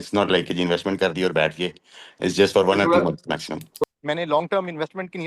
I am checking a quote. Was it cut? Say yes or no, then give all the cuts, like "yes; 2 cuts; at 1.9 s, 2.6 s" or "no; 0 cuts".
yes; 1 cut; at 3.8 s